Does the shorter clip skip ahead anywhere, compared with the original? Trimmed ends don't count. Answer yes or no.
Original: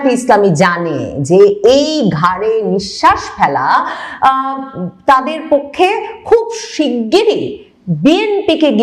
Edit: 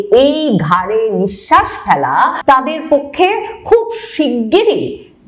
yes